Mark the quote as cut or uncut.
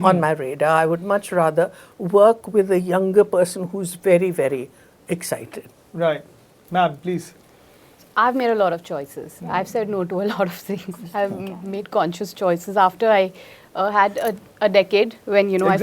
uncut